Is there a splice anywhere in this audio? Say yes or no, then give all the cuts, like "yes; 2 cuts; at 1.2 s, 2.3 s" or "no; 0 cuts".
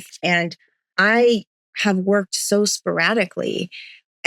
no; 0 cuts